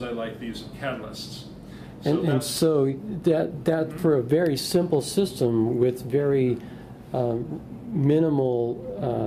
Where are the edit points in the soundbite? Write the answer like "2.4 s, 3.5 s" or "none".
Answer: none